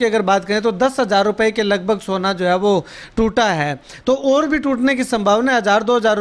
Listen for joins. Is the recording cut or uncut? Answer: uncut